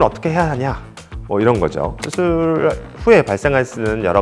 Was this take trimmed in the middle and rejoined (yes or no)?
yes